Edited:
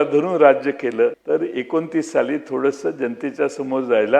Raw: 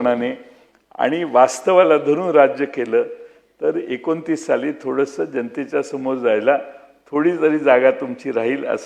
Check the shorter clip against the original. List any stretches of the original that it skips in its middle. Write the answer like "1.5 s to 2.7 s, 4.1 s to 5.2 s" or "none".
3.1 s to 3.5 s